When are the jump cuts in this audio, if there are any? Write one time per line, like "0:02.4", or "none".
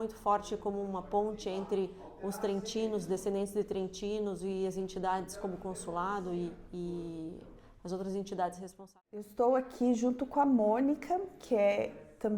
0:08.8